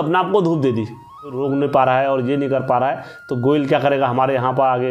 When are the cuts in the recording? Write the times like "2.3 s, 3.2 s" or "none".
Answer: 1.4 s